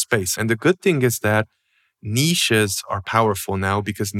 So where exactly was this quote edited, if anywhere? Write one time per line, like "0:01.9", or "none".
none